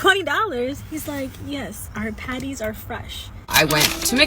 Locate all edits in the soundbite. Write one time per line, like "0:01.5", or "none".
0:03.3